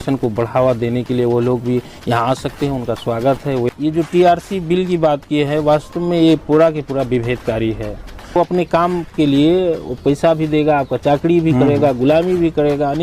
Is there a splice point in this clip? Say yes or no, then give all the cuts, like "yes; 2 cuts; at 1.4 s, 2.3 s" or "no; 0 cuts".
yes; 2 cuts; at 3.7 s, 8.4 s